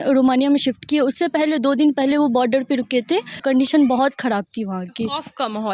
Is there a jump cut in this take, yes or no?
yes